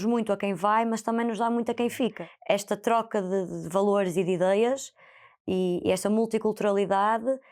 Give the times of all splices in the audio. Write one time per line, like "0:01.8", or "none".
0:02.2